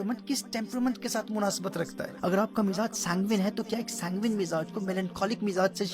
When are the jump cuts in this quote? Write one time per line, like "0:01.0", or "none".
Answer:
0:02.0